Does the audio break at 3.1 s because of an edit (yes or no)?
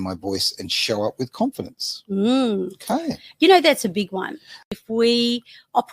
no